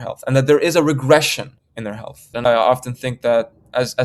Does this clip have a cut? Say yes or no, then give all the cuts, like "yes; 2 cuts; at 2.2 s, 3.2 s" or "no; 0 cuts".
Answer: yes; 1 cut; at 2.3 s